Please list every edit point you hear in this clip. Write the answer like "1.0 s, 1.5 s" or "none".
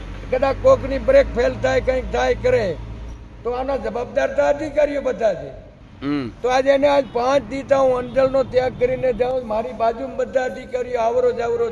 none